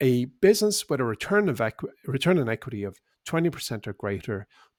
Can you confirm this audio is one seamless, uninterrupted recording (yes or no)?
yes